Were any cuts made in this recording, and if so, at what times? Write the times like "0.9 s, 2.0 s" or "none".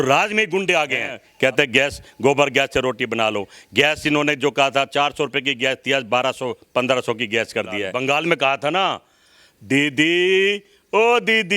1.2 s, 7.9 s